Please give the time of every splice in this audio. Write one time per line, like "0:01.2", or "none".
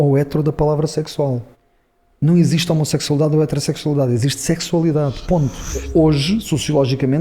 0:05.9